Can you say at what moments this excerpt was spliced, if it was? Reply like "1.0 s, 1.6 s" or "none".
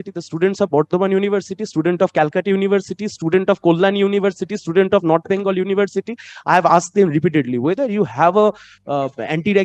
none